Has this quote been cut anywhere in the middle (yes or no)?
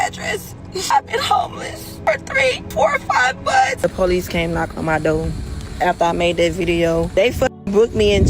yes